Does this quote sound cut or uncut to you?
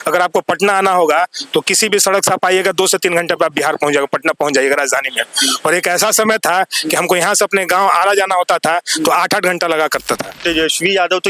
cut